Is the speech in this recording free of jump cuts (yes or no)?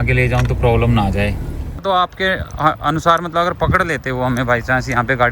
no